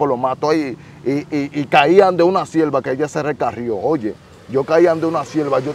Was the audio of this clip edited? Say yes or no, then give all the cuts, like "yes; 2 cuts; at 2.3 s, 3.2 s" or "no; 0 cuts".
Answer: no; 0 cuts